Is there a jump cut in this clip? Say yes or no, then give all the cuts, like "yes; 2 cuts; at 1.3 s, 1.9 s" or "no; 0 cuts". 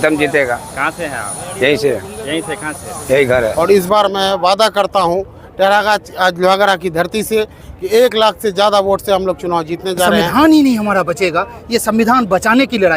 yes; 2 cuts; at 3.5 s, 10.2 s